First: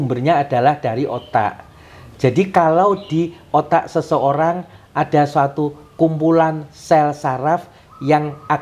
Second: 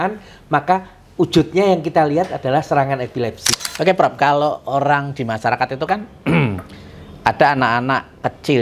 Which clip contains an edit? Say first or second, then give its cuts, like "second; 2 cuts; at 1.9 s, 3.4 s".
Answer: second; 1 cut; at 3.6 s